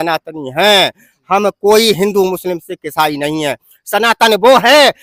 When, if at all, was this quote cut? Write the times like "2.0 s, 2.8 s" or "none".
none